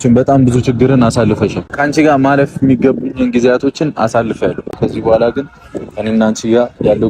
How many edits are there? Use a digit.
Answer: 2